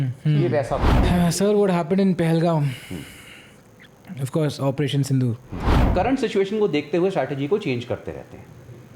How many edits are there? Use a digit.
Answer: 2